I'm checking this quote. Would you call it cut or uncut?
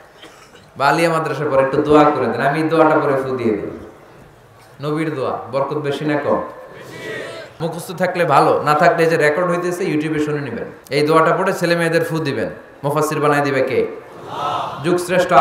cut